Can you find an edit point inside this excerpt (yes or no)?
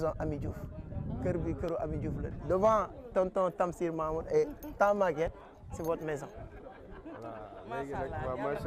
yes